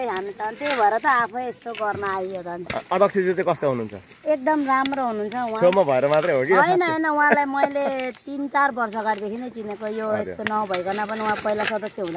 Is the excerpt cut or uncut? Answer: uncut